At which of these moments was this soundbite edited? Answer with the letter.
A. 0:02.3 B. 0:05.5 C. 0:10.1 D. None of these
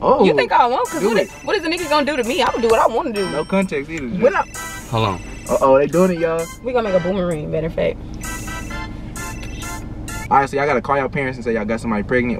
C